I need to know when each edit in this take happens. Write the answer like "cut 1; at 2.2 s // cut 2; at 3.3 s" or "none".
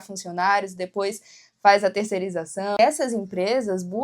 cut 1; at 2.8 s